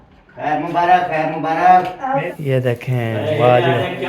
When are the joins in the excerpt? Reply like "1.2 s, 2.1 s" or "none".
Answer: 2.3 s